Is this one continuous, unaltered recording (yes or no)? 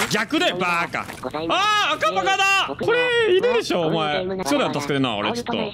no